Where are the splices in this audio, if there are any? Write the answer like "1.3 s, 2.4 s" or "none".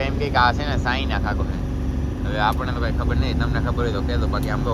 none